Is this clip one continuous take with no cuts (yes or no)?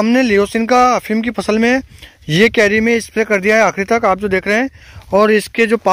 yes